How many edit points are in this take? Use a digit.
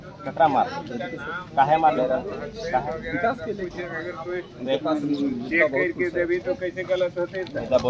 0